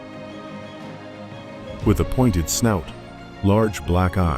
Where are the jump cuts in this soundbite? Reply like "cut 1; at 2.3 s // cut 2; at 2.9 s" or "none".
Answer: cut 1; at 1.8 s